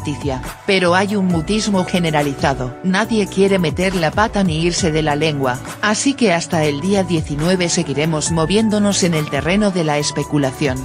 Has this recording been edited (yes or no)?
yes